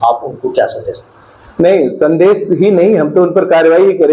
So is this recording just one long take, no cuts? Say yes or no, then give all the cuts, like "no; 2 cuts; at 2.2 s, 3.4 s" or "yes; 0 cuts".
yes; 0 cuts